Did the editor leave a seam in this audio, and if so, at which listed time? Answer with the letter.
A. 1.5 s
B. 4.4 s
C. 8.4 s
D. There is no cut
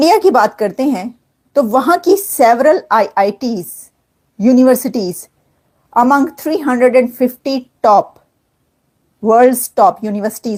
D